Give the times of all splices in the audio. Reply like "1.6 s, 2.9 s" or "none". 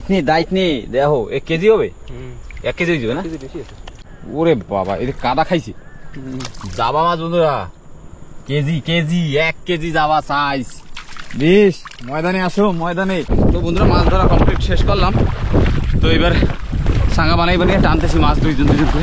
3.9 s, 13.3 s